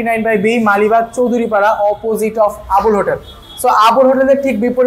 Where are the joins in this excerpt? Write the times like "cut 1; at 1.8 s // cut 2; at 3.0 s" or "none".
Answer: none